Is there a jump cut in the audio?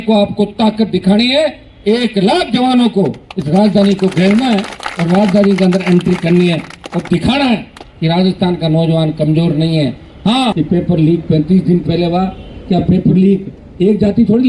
yes; 1 cut; at 10.5 s

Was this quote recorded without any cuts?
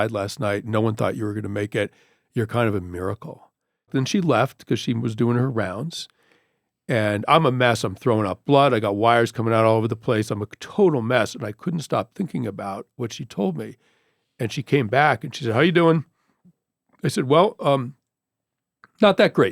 no; 1 cut; at 3.9 s

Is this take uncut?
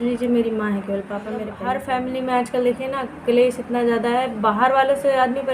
no; 1 cut; at 1.5 s

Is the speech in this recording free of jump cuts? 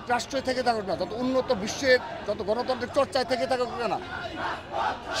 yes; 0 cuts

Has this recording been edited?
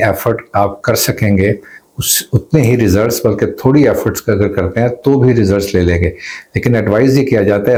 no; 0 cuts

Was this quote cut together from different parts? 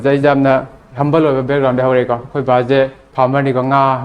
yes; 1 cut; at 3.0 s

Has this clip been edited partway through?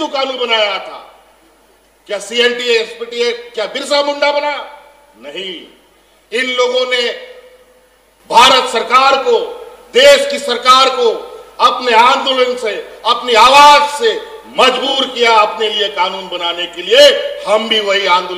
no; 0 cuts

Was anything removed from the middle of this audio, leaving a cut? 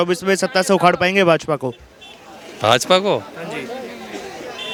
no; 0 cuts

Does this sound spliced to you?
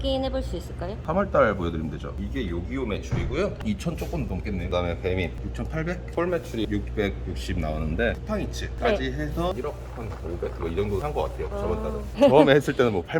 yes; 4 cuts; at 4.6 s, 6.0 s, 8.2 s, 12.0 s

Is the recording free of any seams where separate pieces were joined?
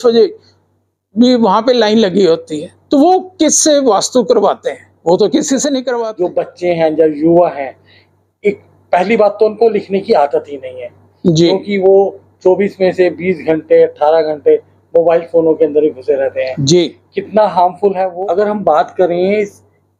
no; 2 cuts; at 6.1 s, 18.1 s

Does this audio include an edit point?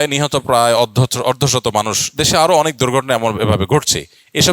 no; 0 cuts

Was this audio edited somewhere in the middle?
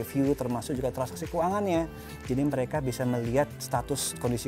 yes; 1 cut; at 2.1 s

